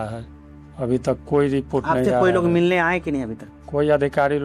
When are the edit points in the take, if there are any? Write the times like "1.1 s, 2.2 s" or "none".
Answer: none